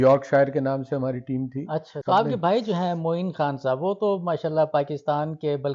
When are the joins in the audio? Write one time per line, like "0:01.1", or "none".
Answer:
0:01.9